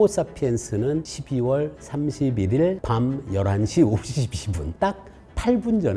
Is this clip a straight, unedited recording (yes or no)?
no